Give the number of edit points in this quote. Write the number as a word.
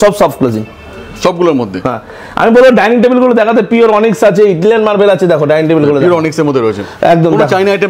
zero